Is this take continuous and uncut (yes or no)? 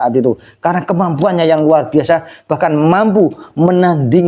yes